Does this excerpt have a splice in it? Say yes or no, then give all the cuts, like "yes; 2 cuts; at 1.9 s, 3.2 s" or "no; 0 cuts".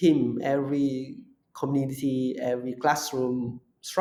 no; 0 cuts